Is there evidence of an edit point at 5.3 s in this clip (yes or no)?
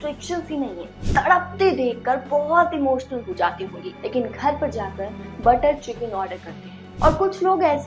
no